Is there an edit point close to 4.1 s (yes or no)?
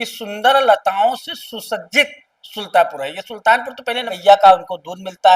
yes